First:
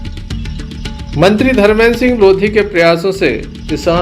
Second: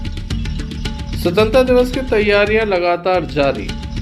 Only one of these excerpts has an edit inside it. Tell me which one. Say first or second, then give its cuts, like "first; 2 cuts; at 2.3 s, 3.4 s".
first; 1 cut; at 1.1 s